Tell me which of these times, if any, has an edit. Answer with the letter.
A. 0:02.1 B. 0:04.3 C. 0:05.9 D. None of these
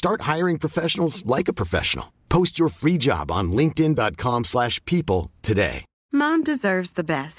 C